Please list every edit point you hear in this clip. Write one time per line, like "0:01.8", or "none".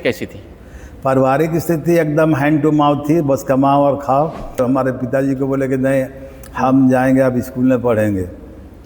0:04.4